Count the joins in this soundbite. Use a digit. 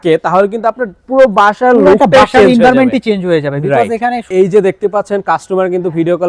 1